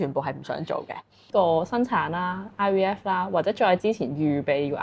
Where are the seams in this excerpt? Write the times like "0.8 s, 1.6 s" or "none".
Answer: 1.3 s